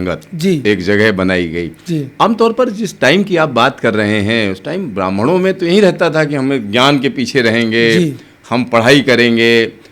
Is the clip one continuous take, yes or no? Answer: yes